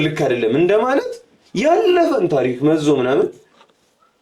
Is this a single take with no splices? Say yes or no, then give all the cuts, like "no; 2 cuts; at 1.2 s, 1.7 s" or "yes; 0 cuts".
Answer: yes; 0 cuts